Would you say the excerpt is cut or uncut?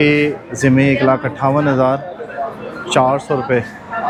uncut